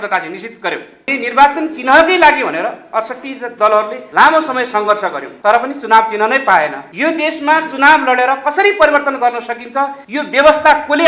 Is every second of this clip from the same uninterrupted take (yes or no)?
no